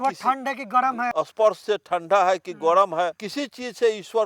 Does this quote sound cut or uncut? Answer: cut